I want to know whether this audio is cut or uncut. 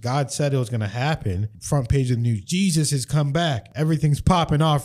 cut